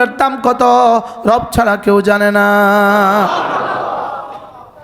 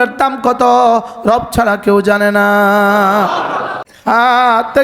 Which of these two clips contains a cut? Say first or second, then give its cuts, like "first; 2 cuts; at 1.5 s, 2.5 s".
second; 1 cut; at 3.8 s